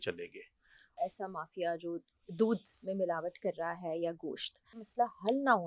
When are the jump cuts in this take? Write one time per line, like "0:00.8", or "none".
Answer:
0:01.0
0:04.8